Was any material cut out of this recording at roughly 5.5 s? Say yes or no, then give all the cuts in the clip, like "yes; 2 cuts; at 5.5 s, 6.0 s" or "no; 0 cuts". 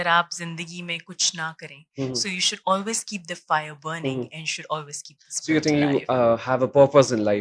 no; 0 cuts